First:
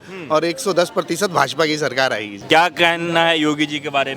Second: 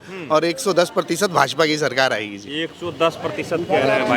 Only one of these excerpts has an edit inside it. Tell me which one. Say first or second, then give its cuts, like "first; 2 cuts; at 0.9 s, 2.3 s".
first; 1 cut; at 2.3 s